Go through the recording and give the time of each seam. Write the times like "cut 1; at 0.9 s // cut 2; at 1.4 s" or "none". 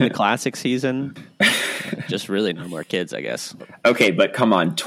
cut 1; at 1.5 s // cut 2; at 3.6 s